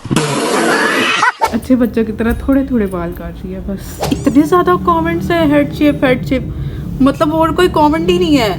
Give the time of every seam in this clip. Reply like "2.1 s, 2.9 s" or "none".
1.5 s, 4.1 s